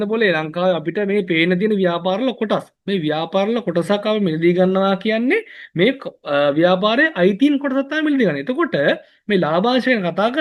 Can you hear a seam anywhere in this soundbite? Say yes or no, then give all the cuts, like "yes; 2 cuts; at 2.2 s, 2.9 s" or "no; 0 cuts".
no; 0 cuts